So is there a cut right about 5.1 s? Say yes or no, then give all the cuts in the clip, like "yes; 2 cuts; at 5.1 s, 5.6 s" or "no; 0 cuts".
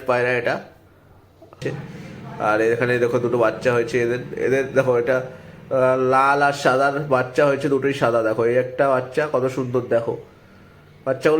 no; 1 cut; at 1.6 s